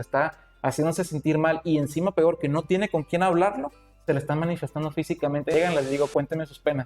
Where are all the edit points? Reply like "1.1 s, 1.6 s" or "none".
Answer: 5.5 s